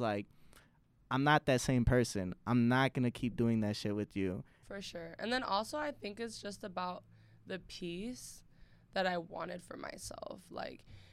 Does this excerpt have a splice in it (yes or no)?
yes